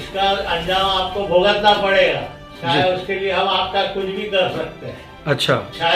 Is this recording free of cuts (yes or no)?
yes